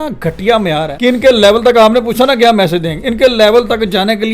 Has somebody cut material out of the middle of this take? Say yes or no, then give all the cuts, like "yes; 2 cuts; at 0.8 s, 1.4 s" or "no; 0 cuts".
yes; 1 cut; at 0.9 s